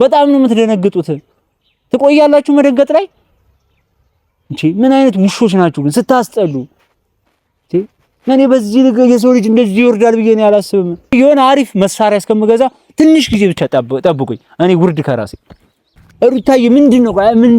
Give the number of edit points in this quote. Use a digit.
2